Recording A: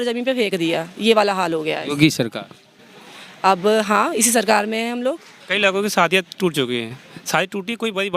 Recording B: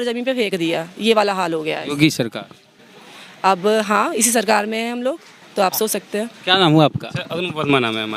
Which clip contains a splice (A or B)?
A